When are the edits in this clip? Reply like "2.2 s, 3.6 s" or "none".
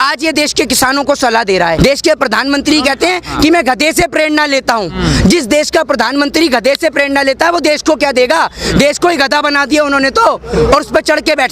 1.8 s